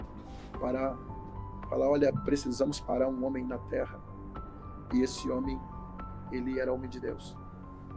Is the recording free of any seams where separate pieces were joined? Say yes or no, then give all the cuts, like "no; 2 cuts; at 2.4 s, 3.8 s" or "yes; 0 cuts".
yes; 0 cuts